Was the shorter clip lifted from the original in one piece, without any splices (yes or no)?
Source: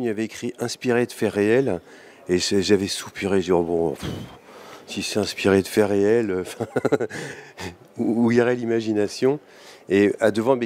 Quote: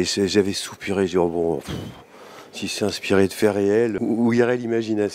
no